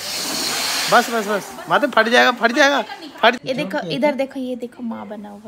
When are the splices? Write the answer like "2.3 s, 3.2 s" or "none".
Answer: 3.4 s